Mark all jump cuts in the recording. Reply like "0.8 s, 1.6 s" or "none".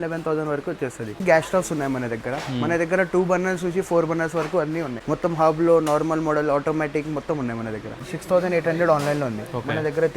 1.2 s, 5.0 s, 8.0 s